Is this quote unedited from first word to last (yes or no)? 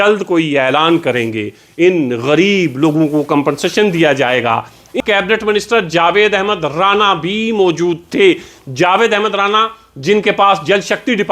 no